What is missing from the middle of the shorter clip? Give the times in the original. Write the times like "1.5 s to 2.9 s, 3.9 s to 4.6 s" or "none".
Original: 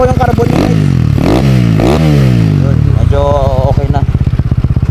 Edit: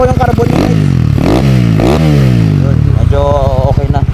none

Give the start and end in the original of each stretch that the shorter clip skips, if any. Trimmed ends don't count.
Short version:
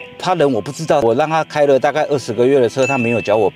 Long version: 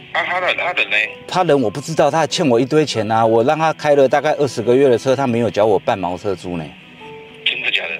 2.1 s to 3.3 s

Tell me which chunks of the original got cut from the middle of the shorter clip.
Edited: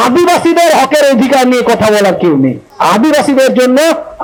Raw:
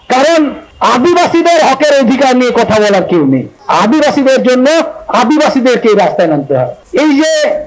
none

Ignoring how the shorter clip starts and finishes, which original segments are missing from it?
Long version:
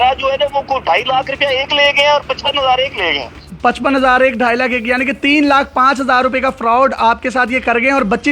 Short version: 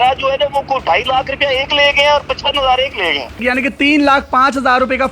3.4 s to 4.8 s

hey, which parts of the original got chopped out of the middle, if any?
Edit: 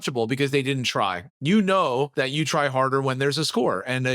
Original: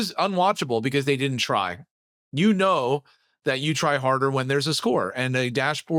1.8 s to 2.2 s, 3.0 s to 3.4 s

